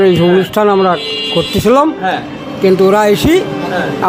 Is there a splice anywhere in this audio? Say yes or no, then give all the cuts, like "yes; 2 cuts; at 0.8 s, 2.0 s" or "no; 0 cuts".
no; 0 cuts